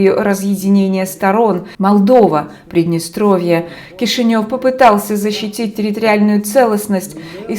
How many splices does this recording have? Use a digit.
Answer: 1